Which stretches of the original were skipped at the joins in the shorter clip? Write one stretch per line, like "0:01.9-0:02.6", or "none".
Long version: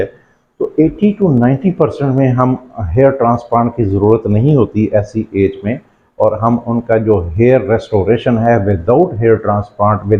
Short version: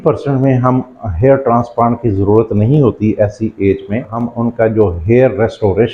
0:05.9-0:06.5